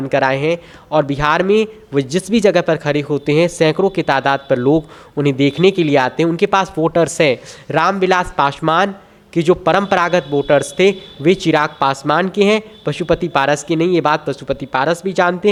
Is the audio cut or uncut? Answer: uncut